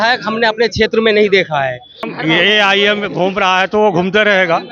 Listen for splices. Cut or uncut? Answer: cut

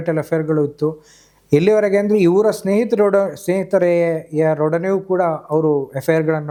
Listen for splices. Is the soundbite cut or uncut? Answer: uncut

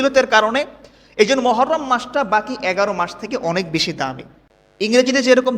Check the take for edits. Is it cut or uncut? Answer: cut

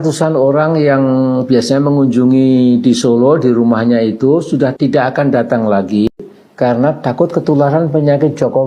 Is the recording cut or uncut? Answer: cut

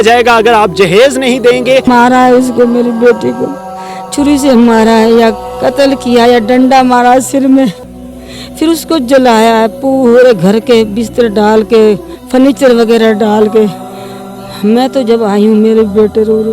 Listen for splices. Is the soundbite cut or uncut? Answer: cut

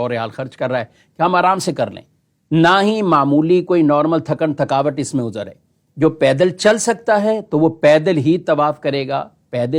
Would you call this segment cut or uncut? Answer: uncut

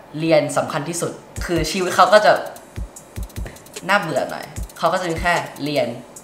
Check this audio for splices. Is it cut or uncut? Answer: uncut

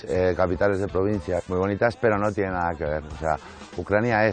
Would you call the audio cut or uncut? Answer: cut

